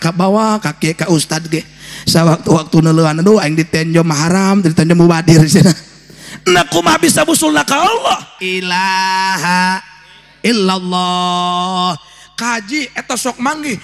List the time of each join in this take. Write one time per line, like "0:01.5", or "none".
0:08.4